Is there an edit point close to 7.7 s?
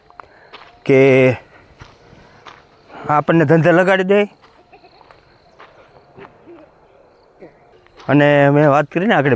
yes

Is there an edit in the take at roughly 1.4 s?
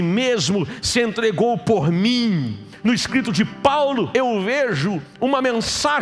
no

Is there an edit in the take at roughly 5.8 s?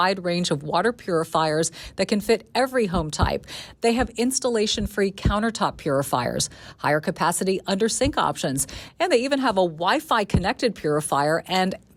no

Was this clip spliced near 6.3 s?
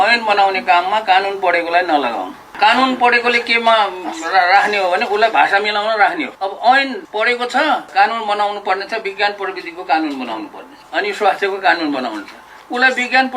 yes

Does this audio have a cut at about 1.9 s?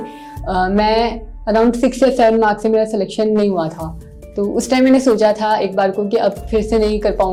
no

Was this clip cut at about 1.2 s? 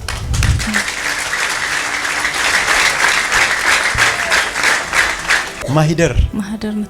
no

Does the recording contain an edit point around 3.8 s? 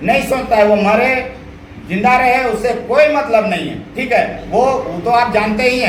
no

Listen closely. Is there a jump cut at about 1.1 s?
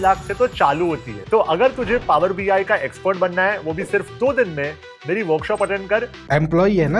no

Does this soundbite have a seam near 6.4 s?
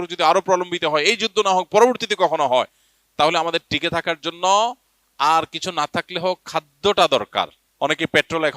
no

